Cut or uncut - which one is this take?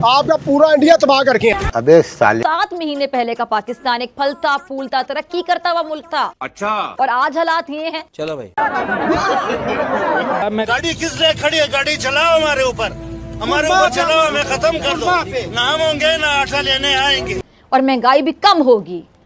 cut